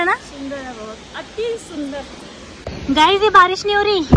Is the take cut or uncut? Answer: cut